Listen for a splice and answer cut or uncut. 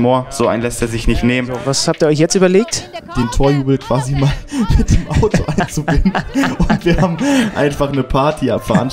cut